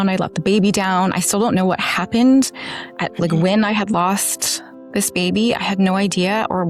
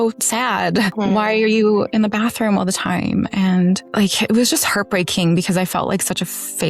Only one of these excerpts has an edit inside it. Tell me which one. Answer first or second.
second